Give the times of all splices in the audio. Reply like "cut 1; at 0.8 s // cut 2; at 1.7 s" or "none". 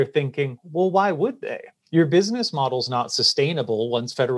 none